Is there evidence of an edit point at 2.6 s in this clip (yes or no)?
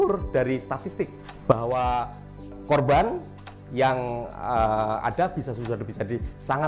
yes